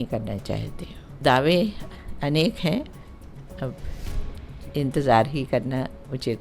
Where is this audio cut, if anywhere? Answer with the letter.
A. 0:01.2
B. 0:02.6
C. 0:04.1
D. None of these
A